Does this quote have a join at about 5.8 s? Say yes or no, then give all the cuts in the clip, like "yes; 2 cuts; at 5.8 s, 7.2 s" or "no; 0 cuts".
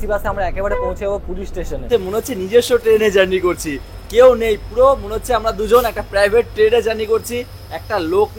no; 1 cut; at 1.8 s